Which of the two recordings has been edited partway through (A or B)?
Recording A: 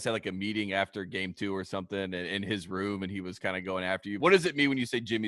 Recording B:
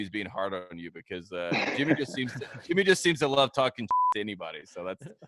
A